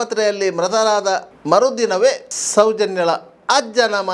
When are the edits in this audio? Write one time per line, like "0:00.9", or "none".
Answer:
0:01.3
0:02.3